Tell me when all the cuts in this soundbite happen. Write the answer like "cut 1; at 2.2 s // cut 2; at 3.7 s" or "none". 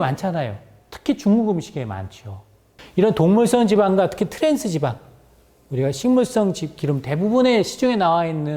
cut 1; at 2.7 s

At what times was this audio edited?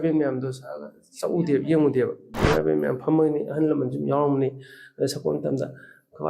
cut 1; at 2.4 s

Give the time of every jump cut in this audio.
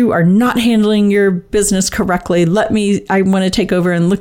none

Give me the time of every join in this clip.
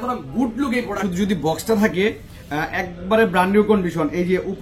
cut 1; at 0.9 s

